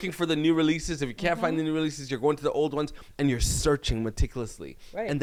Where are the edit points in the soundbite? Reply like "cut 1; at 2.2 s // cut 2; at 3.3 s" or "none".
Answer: none